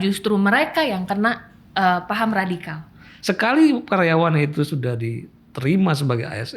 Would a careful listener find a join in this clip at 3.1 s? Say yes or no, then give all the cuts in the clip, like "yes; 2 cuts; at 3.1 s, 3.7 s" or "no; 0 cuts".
yes; 1 cut; at 3.1 s